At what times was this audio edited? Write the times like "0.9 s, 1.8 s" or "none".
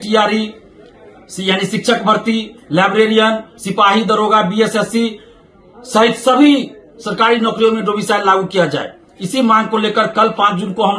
none